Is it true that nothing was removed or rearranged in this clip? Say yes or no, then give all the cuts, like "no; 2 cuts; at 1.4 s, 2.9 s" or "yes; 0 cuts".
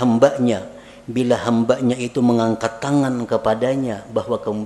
yes; 0 cuts